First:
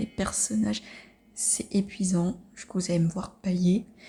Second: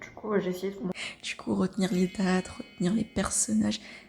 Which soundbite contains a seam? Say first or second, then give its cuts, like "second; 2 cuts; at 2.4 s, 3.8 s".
second; 1 cut; at 1.0 s